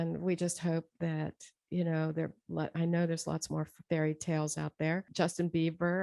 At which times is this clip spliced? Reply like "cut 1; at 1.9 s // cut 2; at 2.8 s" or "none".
cut 1; at 5.1 s